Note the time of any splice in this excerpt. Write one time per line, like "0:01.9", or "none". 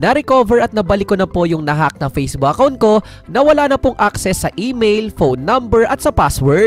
none